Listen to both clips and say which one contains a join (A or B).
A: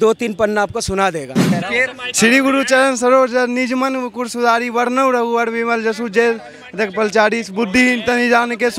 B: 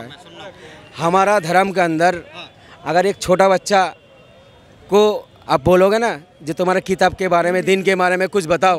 A